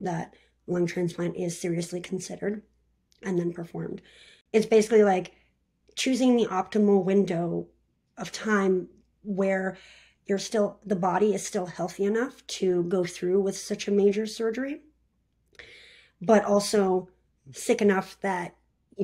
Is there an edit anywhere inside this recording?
no; 0 cuts

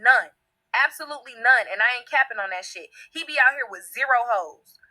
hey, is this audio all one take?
no; 1 cut; at 1.4 s

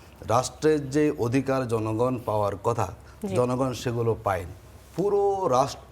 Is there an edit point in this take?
no; 0 cuts

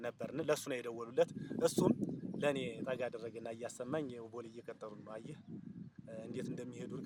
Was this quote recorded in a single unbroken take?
yes; 0 cuts

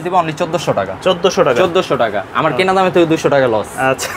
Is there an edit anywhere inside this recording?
no; 0 cuts

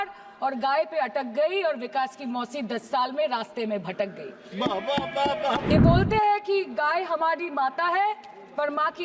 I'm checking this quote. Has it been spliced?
yes; 1 cut; at 5.7 s

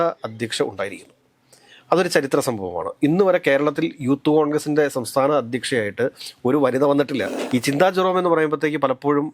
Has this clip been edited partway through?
yes; 1 cut; at 7.4 s

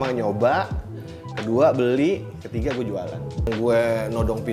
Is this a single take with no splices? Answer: no; 1 cut; at 3.5 s

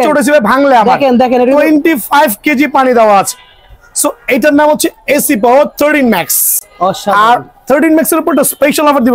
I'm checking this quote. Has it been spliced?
no; 0 cuts

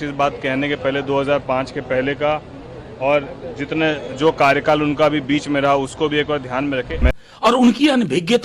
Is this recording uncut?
no; 1 cut; at 7.1 s

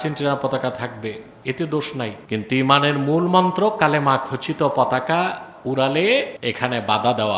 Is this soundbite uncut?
no; 2 cuts; at 2.2 s, 6.3 s

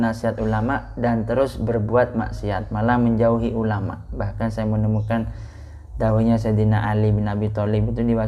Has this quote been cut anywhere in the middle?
no; 0 cuts

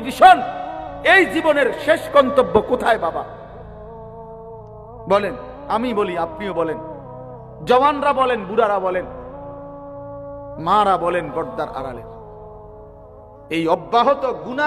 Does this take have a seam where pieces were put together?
no; 0 cuts

